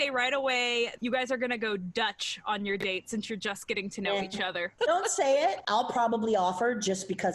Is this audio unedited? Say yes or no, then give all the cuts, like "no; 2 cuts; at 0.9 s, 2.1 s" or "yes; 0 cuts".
yes; 0 cuts